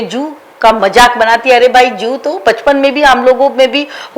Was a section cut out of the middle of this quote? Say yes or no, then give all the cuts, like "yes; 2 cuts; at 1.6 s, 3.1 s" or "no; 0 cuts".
no; 0 cuts